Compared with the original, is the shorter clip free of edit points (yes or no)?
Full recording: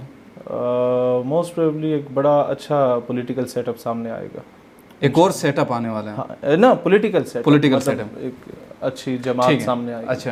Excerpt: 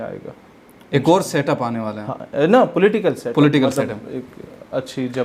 yes